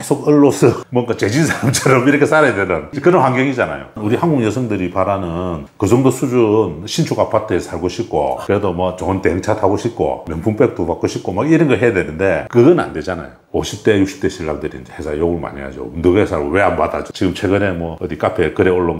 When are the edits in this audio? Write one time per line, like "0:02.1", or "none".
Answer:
0:04.0
0:13.4
0:17.0

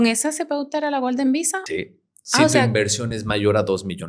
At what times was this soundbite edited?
0:01.6

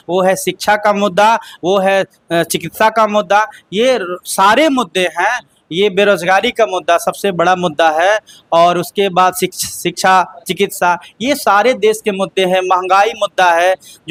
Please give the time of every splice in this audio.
none

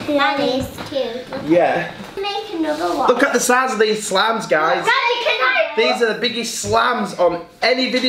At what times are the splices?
0:02.1

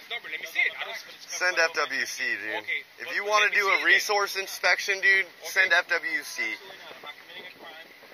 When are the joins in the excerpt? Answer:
none

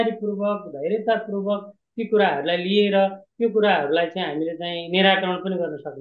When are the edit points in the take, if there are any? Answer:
none

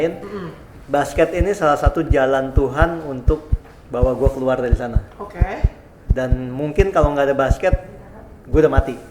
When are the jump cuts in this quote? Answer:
none

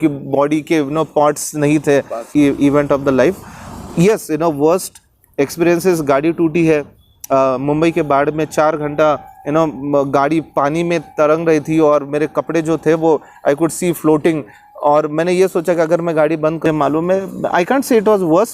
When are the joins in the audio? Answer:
0:02.2
0:16.6

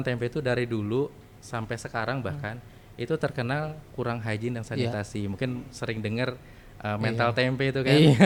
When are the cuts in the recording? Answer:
none

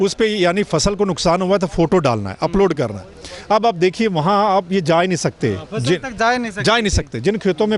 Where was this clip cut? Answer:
none

